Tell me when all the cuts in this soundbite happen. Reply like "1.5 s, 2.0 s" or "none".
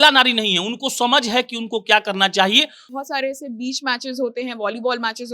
2.9 s